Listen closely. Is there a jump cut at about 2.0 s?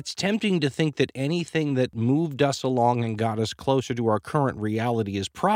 yes; 1 cut; at 2.0 s

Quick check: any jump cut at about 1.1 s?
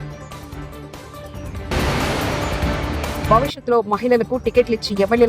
yes; 1 cut; at 1.1 s

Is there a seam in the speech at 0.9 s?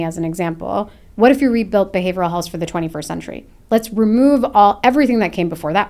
no; 0 cuts

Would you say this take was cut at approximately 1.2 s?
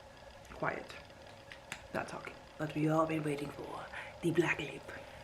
no; 1 cut; at 2.5 s

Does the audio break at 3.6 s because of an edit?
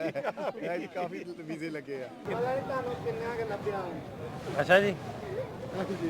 no; 1 cut; at 2.2 s

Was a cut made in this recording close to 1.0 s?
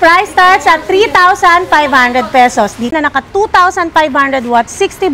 no; 1 cut; at 2.9 s

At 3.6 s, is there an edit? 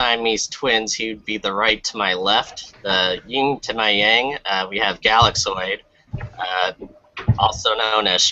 yes; 1 cut; at 3.6 s

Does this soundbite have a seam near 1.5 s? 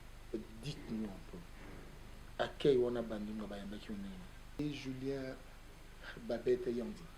no; 1 cut; at 4.6 s

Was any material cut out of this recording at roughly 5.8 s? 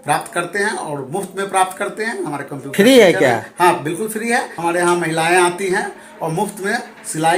no; 1 cut; at 4.5 s

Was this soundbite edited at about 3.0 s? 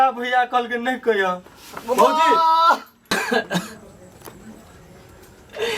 yes; 1 cut; at 3.0 s

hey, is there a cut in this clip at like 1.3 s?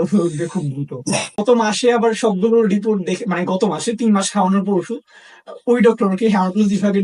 yes; 1 cut; at 1.3 s

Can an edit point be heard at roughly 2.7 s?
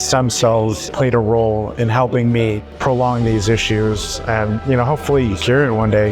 yes; 2 cuts; at 0.9 s, 2.7 s

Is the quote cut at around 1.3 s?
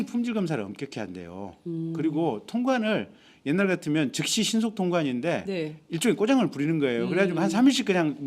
yes; 1 cut; at 1.3 s

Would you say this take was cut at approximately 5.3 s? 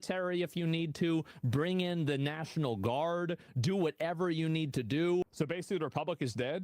yes; 1 cut; at 5.3 s

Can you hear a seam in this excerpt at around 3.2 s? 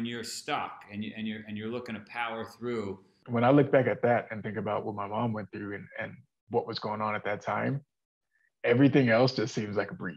yes; 1 cut; at 3.2 s

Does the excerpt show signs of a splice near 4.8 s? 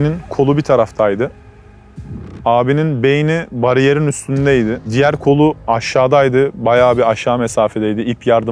yes; 1 cut; at 4.8 s

